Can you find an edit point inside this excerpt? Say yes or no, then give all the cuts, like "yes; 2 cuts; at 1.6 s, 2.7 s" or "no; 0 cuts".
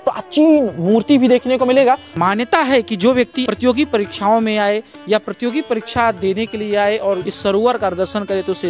yes; 3 cuts; at 2.1 s, 3.4 s, 7.3 s